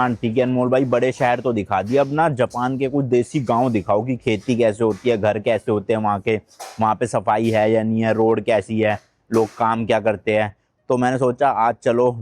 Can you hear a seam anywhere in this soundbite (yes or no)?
no